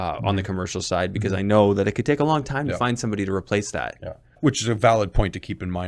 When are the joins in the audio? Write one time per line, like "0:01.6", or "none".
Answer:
0:04.3

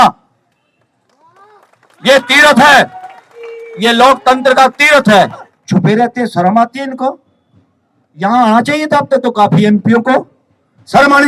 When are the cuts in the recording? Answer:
0:05.5

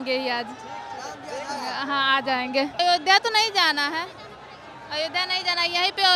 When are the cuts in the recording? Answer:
0:02.8

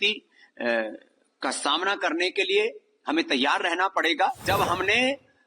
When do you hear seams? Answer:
0:04.4

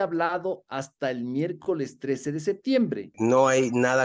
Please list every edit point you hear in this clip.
0:03.1

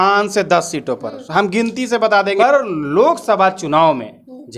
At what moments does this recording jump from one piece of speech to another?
0:02.4

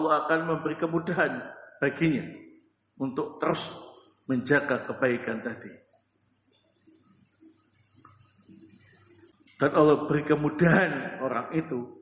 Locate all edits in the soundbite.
0:09.3

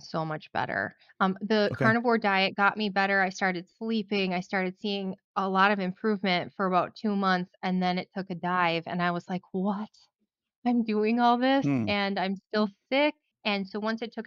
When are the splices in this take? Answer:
none

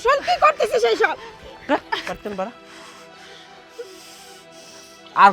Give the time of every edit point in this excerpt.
none

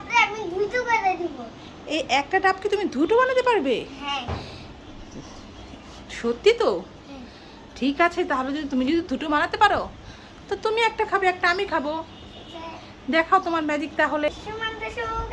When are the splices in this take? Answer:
0:14.3

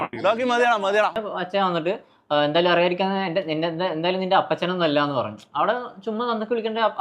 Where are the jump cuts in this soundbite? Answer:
0:01.2

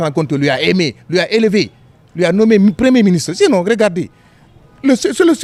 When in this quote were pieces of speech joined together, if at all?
none

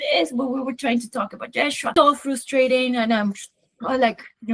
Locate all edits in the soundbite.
0:01.9

